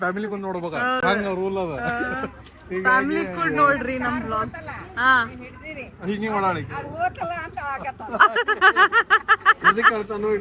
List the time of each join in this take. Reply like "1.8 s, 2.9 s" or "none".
none

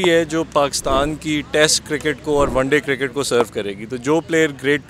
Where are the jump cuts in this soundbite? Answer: none

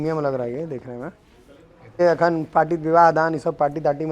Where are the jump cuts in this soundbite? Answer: 2.0 s

